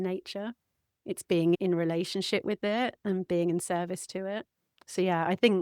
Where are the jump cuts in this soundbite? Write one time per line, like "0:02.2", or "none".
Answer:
0:01.6